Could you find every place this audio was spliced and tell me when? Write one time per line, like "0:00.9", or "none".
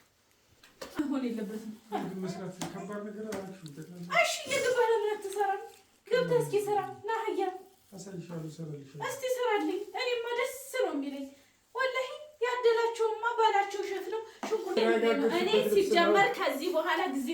0:01.0
0:14.8